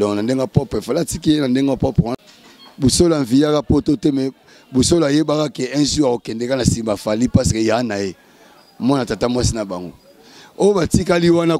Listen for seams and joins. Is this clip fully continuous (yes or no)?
no